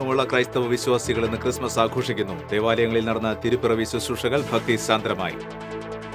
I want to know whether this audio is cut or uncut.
uncut